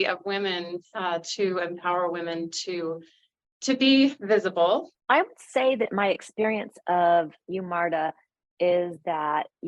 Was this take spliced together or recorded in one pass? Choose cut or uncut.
cut